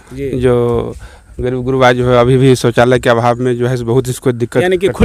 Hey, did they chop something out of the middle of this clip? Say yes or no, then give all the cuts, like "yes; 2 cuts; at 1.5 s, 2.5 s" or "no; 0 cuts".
no; 0 cuts